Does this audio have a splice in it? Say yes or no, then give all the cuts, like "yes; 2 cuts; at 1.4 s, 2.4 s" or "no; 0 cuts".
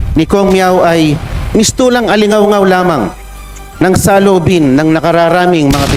no; 0 cuts